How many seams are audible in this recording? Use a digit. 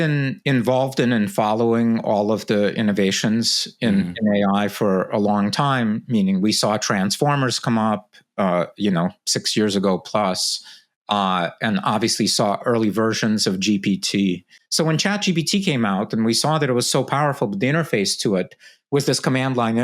1